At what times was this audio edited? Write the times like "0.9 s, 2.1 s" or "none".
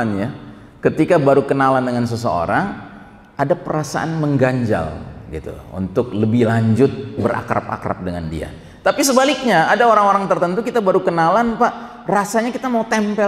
none